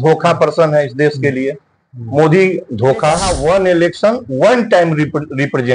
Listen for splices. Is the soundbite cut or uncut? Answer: cut